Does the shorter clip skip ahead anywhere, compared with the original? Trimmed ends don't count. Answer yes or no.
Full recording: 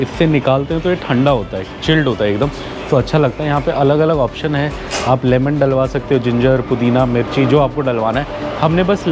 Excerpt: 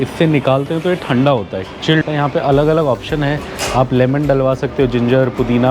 yes